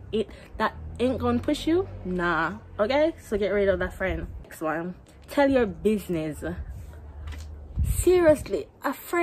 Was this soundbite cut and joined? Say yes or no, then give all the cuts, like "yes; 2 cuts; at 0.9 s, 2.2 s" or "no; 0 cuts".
no; 0 cuts